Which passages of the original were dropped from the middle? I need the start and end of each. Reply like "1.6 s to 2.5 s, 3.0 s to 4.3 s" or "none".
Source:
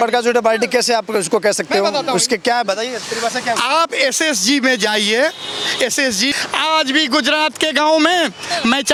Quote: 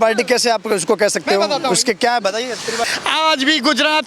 3.4 s to 6.4 s